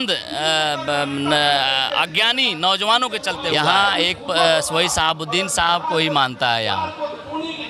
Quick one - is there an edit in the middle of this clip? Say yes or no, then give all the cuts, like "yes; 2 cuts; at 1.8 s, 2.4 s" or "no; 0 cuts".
yes; 1 cut; at 3.5 s